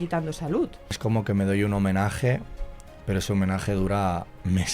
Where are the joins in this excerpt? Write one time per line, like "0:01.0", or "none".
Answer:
0:01.0